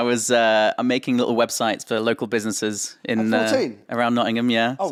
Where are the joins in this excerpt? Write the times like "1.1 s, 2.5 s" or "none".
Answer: none